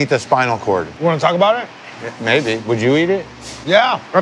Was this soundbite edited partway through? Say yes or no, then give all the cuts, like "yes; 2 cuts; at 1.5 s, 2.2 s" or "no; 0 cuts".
yes; 1 cut; at 0.9 s